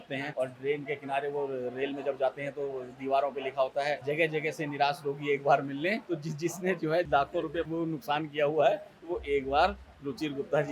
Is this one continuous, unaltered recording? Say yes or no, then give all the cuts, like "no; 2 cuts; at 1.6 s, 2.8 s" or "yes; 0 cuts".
no; 3 cuts; at 4.0 s, 6.0 s, 7.3 s